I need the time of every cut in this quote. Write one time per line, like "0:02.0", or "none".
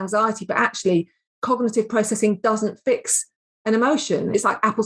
none

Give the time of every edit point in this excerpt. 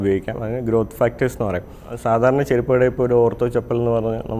0:01.9

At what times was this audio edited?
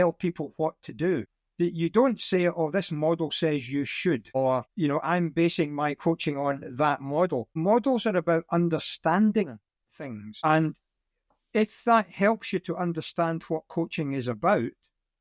0:01.4
0:04.6
0:07.5
0:10.3

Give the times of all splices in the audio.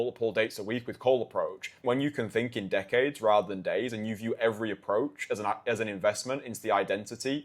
0:01.8

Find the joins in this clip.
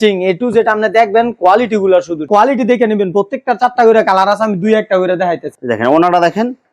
0:02.3
0:05.5

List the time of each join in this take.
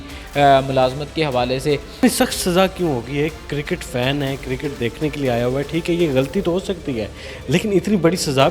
0:02.0

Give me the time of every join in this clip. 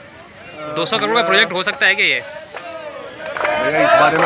none

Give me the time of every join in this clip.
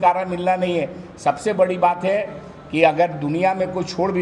none

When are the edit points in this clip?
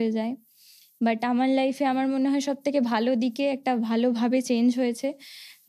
none

